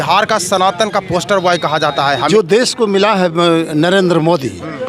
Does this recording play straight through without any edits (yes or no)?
no